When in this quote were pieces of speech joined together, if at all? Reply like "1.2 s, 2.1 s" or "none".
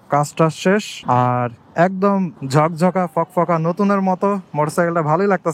0.9 s, 2.4 s